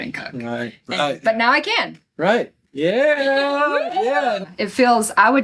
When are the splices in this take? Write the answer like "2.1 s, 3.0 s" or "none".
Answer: 4.5 s